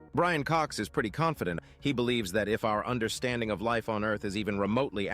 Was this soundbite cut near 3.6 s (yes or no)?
no